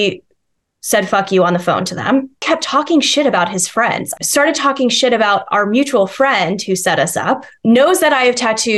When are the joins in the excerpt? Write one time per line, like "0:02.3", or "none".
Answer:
0:02.4
0:04.1
0:07.5

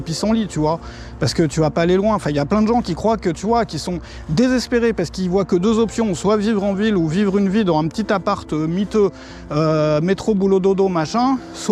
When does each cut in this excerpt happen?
none

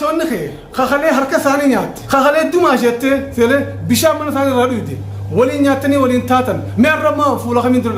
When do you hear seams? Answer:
0:02.0

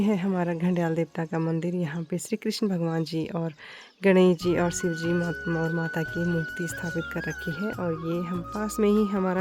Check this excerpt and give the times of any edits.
none

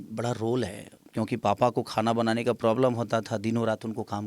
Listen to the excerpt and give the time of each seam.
0:01.0

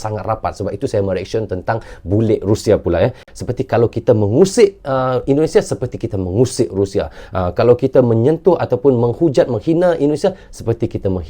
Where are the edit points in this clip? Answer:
0:03.3

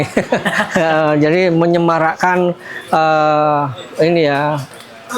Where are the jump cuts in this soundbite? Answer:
none

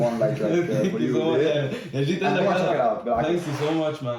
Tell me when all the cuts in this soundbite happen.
none

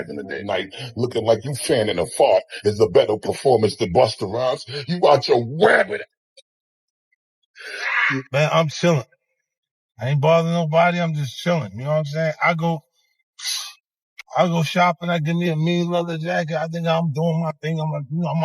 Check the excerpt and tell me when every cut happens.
0:08.3

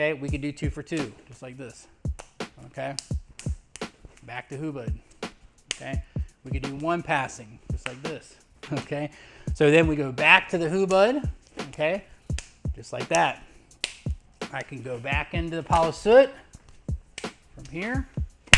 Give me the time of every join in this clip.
0:08.7

